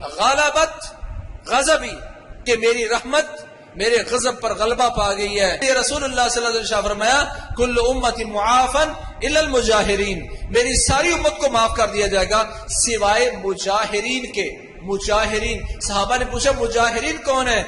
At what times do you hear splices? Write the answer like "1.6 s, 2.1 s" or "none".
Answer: 5.6 s